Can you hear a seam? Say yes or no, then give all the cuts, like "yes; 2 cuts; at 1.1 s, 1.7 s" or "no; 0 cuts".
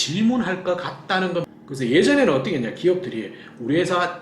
yes; 1 cut; at 1.5 s